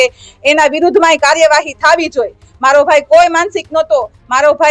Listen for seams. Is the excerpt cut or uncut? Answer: uncut